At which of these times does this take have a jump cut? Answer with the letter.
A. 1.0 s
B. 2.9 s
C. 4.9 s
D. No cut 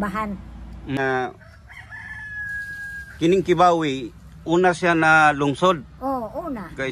A